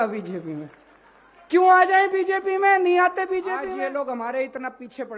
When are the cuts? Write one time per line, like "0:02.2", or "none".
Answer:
0:03.7